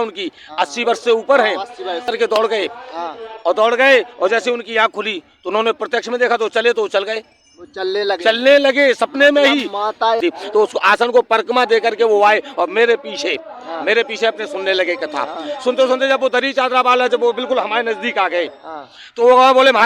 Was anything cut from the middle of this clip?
yes; 2 cuts; at 2.1 s, 10.2 s

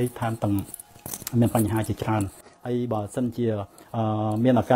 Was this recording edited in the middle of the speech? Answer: yes; 1 cut; at 2.5 s

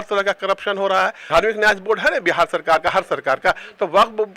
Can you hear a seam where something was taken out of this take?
yes; 1 cut; at 1.2 s

